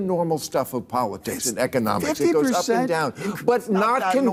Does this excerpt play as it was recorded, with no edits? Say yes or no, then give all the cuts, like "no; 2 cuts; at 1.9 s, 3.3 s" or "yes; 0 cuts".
yes; 0 cuts